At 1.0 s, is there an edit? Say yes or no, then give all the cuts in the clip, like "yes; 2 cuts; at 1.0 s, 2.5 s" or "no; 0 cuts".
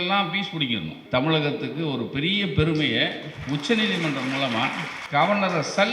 yes; 2 cuts; at 1.0 s, 4.9 s